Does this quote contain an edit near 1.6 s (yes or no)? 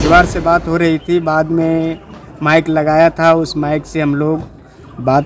no